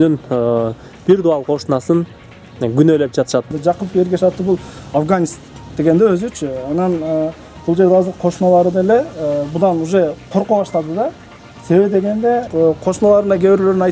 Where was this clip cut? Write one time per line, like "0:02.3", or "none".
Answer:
0:03.5
0:12.5